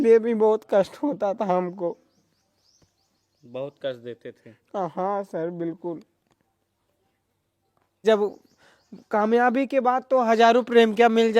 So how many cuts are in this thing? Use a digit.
1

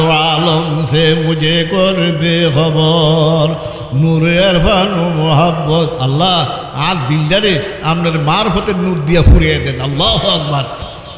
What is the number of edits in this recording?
0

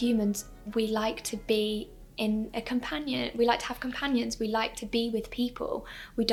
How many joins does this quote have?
0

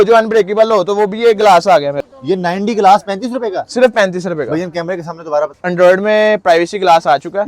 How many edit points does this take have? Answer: 2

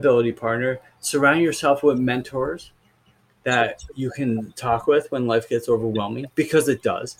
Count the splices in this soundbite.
0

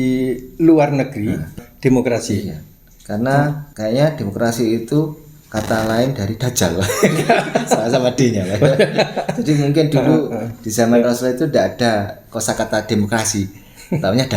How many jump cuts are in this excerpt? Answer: 2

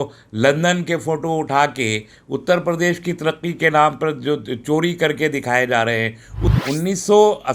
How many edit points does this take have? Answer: 1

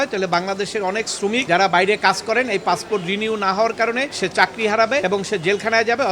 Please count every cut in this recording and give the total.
3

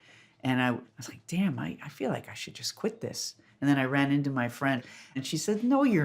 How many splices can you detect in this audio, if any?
3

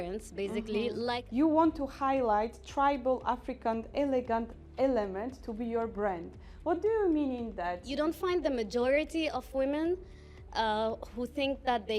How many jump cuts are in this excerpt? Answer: 2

